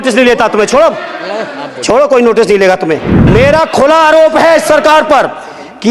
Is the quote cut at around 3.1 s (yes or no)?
yes